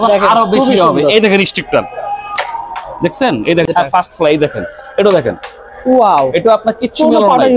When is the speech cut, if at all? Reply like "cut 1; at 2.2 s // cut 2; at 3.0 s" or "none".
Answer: cut 1; at 3.7 s